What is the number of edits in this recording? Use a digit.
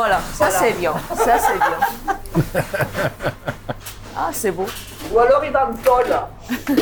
0